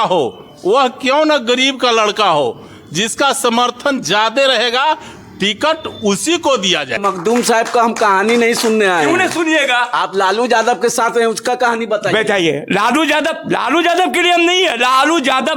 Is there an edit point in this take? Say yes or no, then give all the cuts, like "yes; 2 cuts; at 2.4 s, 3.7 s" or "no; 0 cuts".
yes; 1 cut; at 7.0 s